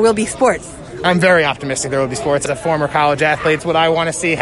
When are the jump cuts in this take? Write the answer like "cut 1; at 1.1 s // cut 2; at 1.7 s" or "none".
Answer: cut 1; at 2.4 s // cut 2; at 3.6 s